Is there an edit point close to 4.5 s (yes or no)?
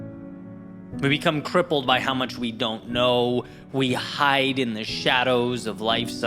no